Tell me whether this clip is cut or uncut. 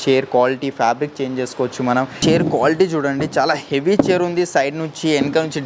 cut